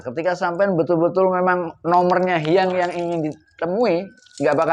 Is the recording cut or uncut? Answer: uncut